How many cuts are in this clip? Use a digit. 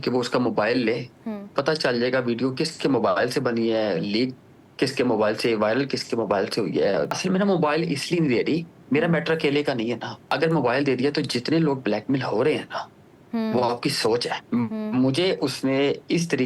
4